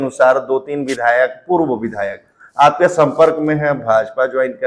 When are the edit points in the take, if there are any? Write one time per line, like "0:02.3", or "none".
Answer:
none